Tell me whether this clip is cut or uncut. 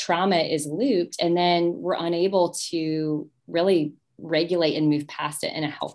uncut